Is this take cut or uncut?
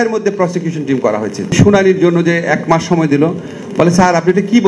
cut